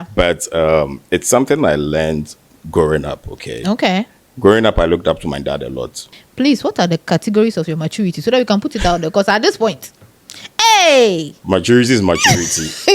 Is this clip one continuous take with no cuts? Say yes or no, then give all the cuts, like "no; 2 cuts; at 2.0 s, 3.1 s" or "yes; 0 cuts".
no; 1 cut; at 6.0 s